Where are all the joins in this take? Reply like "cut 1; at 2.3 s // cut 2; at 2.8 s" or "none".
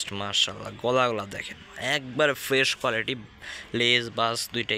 none